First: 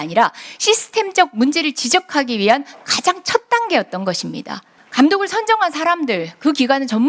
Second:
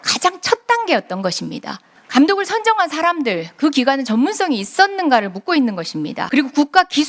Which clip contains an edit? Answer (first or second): second